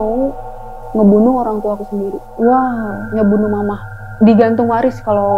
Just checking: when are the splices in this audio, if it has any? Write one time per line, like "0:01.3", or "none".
0:04.1